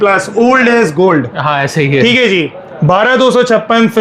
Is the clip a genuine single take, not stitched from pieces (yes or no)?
yes